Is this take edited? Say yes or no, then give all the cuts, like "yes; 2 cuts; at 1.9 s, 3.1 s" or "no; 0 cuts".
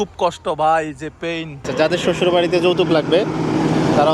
yes; 1 cut; at 1.6 s